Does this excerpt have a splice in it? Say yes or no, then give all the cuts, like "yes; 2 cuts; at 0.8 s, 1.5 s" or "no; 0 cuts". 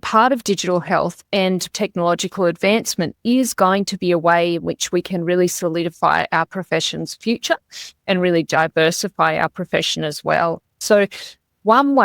yes; 2 cuts; at 1.7 s, 10.8 s